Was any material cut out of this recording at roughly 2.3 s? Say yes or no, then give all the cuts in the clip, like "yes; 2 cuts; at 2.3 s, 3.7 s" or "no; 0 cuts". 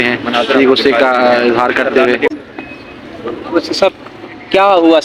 yes; 1 cut; at 2.3 s